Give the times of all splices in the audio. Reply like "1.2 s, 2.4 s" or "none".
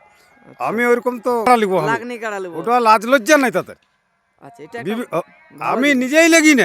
1.5 s